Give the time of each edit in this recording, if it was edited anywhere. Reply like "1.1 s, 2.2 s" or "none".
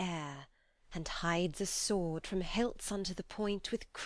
2.2 s